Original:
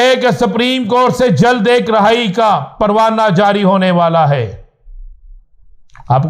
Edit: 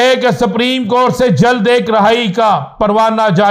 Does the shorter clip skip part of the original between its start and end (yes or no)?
no